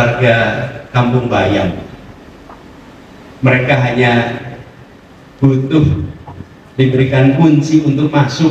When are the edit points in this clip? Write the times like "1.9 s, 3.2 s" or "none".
none